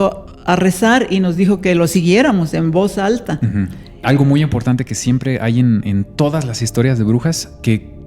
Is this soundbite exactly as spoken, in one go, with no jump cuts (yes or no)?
no